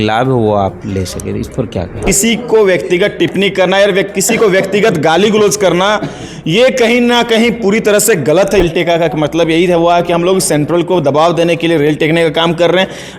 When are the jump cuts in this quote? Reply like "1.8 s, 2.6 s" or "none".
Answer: 2.0 s, 8.6 s